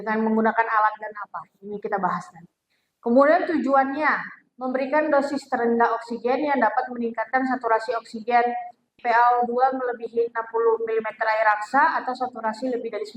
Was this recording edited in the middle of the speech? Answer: yes; 1 cut; at 9.0 s

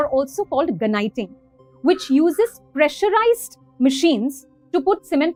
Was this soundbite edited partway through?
no; 0 cuts

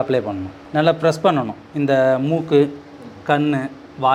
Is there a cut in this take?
no; 0 cuts

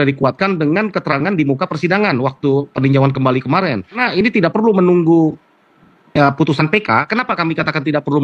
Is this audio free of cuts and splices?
no; 1 cut; at 4.0 s

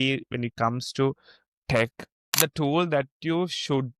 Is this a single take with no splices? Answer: no; 1 cut; at 2.3 s

